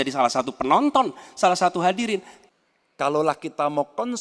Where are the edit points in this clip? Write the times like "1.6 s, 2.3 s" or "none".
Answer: 2.3 s